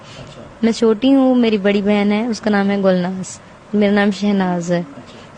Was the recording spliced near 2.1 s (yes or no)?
no